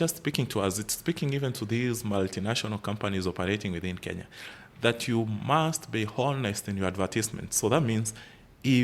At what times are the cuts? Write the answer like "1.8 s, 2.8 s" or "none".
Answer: none